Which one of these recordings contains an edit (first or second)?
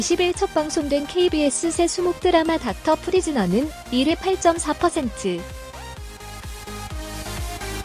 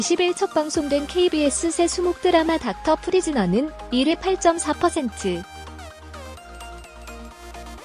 second